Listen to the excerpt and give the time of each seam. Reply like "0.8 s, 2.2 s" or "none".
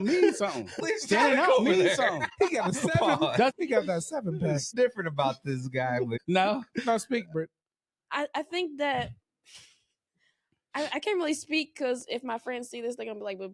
0.8 s, 2.3 s, 3.5 s, 4.7 s, 6.2 s

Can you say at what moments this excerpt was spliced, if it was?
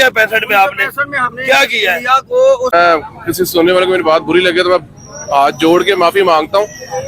2.7 s

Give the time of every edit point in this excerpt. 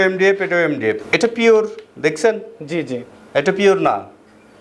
1.0 s

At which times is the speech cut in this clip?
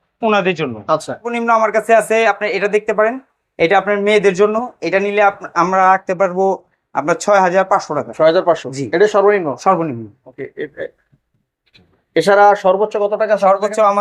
1.3 s

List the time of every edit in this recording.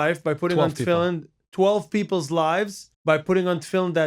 2.9 s

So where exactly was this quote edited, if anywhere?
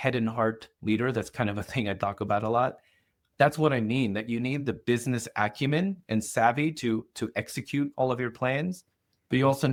none

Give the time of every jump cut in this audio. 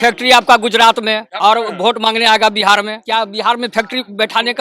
1.3 s, 3.0 s

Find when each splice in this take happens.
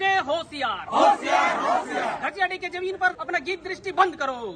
3.2 s

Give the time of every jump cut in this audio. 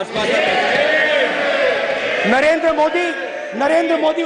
none

